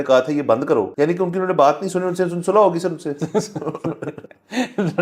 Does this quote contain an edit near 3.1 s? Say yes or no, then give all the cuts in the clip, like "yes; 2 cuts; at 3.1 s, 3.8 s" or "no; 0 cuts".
no; 1 cut; at 0.9 s